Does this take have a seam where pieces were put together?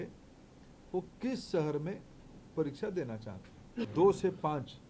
yes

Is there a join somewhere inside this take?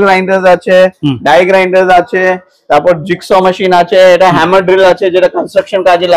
no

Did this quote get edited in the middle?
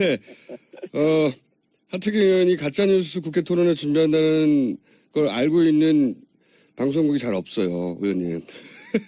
no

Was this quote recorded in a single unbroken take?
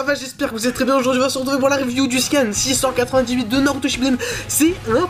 yes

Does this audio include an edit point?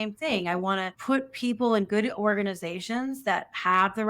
yes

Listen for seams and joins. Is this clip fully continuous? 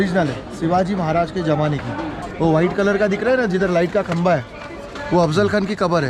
no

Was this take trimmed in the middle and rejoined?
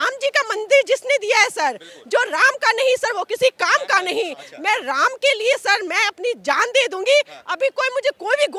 no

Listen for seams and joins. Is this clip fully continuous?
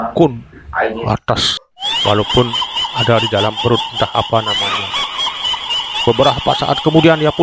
no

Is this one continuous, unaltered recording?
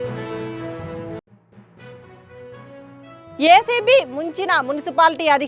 no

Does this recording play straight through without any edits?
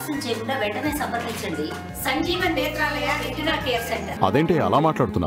no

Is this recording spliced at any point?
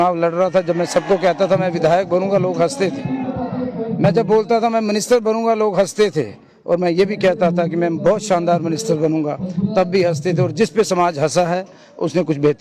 no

